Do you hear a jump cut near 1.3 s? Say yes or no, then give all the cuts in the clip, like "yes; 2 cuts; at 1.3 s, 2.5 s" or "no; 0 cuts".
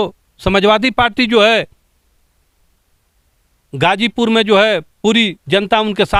no; 0 cuts